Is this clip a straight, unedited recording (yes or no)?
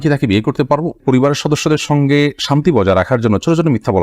no